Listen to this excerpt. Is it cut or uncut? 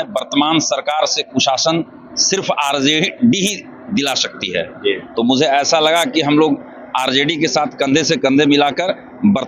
uncut